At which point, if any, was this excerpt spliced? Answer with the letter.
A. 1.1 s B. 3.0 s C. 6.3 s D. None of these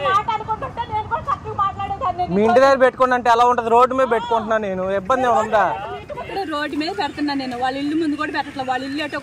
C